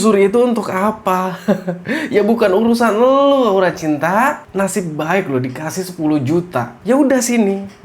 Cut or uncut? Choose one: cut